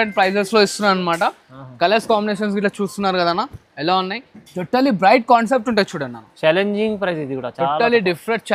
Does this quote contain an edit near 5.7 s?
no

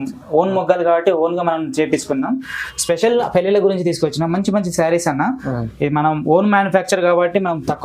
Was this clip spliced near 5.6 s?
no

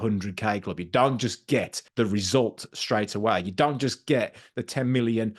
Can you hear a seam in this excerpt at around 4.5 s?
no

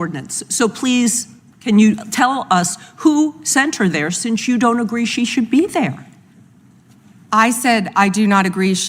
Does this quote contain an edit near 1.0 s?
yes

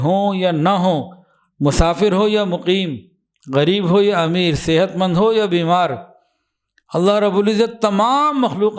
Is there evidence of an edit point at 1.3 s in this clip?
no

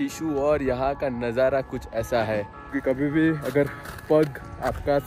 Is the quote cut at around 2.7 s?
yes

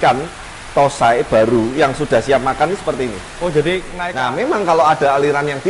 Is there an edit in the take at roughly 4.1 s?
yes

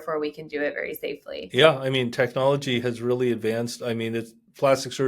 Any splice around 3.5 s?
no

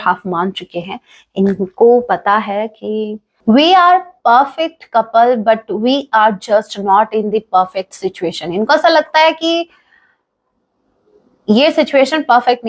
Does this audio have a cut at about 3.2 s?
yes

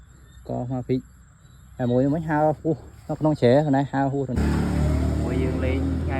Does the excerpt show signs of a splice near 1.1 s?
no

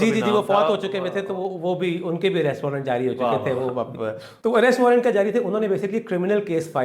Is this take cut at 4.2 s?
yes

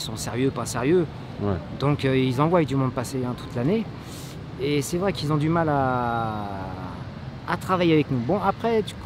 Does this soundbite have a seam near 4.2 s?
no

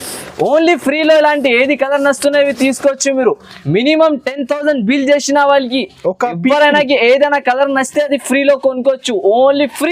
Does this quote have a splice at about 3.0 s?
no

